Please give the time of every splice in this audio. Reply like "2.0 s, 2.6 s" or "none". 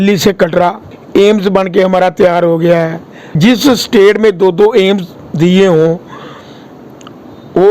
0.9 s